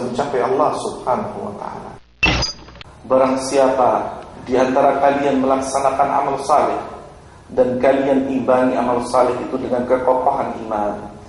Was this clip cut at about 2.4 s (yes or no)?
yes